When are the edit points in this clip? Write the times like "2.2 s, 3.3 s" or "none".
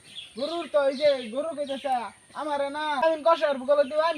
3.0 s

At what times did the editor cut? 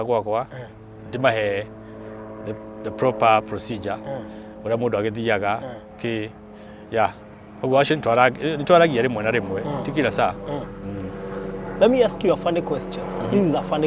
none

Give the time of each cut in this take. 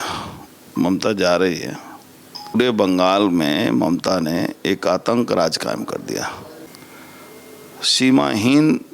2.6 s, 6.7 s

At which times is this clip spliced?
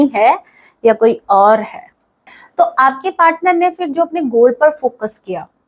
2.4 s

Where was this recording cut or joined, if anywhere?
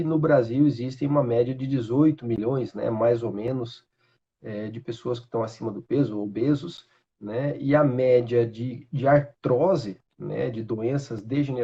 none

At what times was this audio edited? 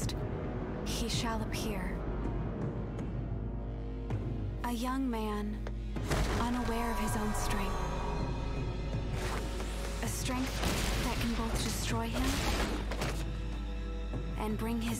none

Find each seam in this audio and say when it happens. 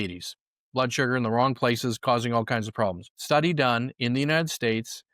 3.1 s

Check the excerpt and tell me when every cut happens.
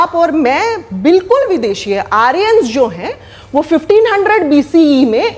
none

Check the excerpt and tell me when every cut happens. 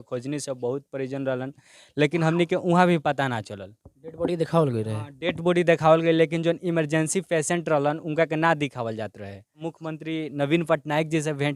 9.6 s

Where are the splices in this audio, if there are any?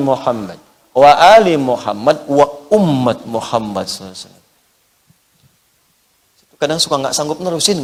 none

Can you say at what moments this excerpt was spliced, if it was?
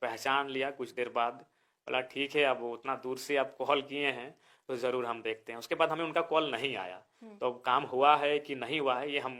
none

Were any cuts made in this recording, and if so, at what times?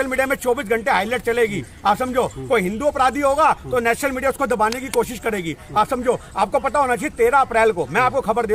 none

